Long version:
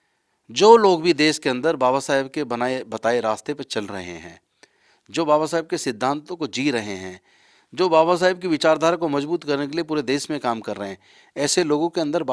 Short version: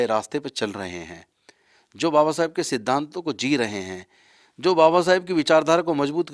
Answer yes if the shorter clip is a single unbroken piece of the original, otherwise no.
yes